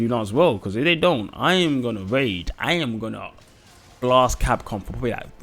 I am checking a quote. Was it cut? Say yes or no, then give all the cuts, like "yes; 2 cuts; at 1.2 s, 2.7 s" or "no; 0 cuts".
no; 0 cuts